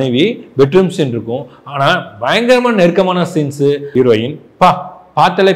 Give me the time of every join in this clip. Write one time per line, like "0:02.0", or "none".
0:03.9